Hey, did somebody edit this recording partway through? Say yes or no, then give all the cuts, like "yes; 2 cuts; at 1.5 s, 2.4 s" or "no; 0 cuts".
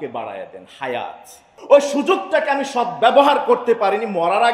yes; 1 cut; at 1.5 s